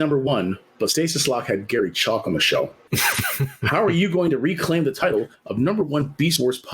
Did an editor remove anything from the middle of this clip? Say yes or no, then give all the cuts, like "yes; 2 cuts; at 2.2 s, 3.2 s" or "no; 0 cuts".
yes; 1 cut; at 2.8 s